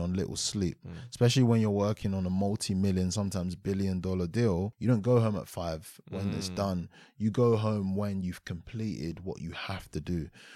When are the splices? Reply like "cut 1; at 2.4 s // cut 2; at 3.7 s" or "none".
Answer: cut 1; at 4.7 s